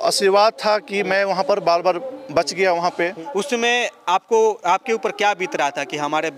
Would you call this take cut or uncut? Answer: cut